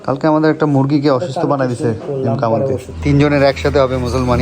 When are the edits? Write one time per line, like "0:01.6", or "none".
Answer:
0:02.9